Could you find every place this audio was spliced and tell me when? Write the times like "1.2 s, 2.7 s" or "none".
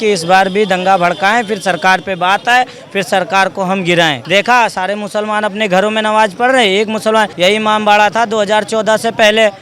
4.2 s, 7.3 s